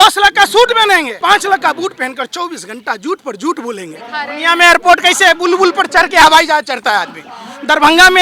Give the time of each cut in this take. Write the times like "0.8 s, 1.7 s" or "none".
1.1 s, 4.3 s